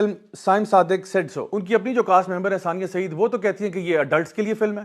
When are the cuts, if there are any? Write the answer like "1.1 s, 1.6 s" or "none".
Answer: 1.6 s